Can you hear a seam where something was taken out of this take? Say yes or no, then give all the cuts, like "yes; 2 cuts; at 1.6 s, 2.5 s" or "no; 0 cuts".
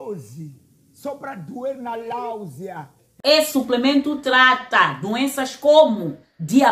yes; 1 cut; at 3.0 s